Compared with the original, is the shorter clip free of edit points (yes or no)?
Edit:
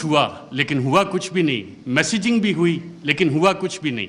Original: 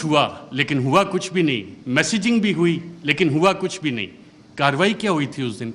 yes